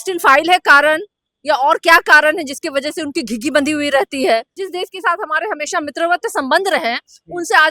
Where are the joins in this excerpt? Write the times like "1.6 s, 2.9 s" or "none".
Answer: 4.6 s